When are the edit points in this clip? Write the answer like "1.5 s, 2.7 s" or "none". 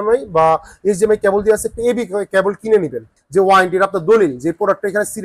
3.1 s